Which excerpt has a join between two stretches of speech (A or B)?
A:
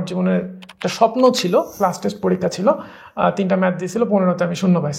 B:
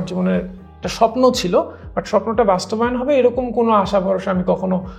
A